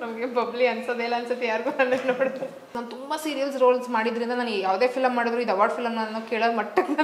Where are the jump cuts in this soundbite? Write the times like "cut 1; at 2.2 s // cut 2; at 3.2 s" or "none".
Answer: cut 1; at 2.8 s